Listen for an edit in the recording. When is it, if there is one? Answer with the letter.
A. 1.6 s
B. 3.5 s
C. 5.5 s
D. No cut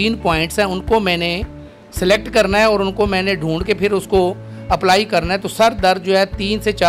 D